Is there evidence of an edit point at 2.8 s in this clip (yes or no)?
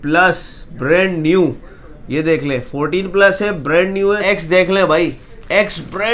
no